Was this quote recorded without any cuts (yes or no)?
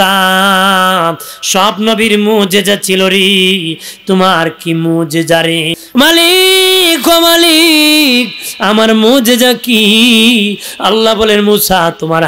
no